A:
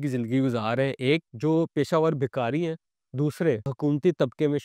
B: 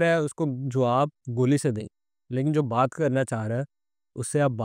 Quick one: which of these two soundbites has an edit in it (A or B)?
A